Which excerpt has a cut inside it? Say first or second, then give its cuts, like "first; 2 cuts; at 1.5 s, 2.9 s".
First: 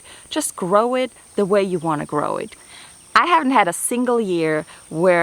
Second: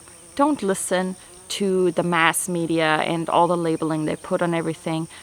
first; 1 cut; at 2.5 s